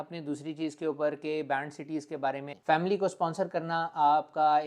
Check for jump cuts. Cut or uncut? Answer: cut